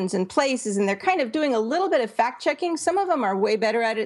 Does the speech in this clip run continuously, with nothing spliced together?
yes; 0 cuts

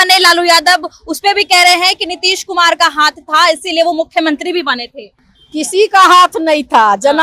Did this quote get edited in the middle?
no; 0 cuts

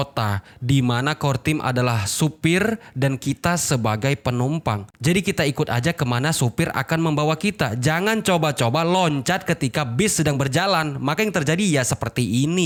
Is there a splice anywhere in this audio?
no; 0 cuts

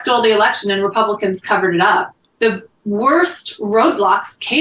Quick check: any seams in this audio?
yes; 1 cut; at 2.2 s

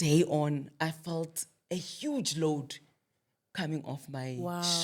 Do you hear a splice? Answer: no; 0 cuts

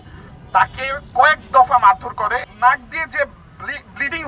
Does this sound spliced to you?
yes; 1 cut; at 2.5 s

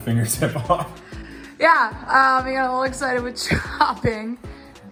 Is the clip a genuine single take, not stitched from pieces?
yes; 0 cuts

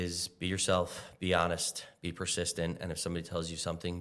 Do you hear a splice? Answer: no; 0 cuts

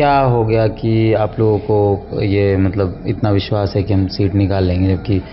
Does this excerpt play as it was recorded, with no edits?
yes; 0 cuts

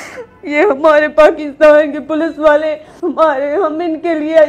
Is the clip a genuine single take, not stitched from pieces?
no; 1 cut; at 2.9 s

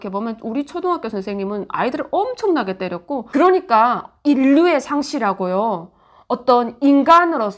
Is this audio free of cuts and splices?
no; 1 cut; at 3.2 s

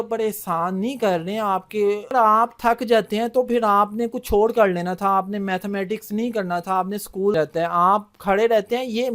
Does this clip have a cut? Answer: yes; 2 cuts; at 2.1 s, 7.3 s

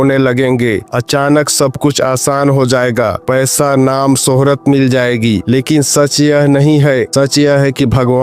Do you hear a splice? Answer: yes; 1 cut; at 7.1 s

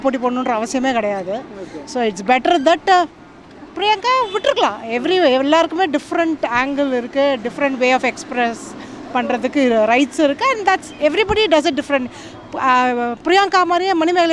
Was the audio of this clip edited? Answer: no; 0 cuts

